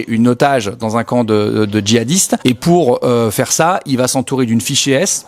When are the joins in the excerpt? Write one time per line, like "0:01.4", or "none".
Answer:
0:02.4

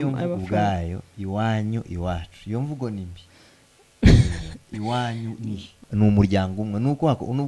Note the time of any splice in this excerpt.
0:05.7

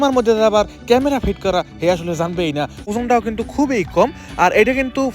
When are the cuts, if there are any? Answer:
0:02.9

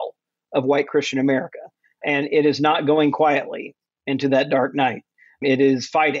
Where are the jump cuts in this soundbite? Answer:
none

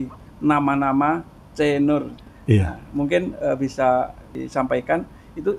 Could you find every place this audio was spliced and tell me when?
0:02.3

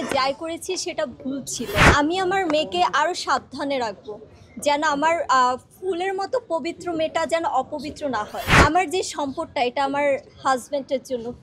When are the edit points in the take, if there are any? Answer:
0:01.9
0:08.4

